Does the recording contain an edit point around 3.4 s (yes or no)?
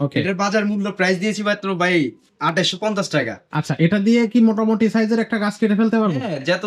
yes